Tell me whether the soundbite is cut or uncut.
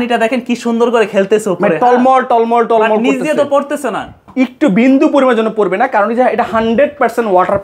uncut